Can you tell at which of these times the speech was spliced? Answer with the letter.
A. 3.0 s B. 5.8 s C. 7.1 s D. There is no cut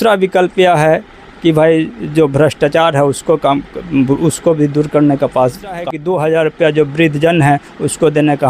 B